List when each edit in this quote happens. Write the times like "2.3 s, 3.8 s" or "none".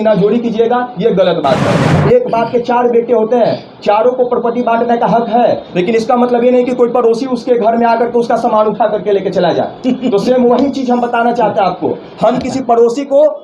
1.9 s

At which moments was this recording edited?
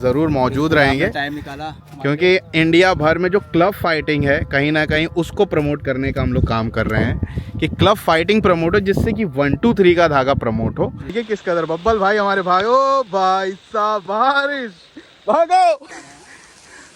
11.2 s, 15.9 s

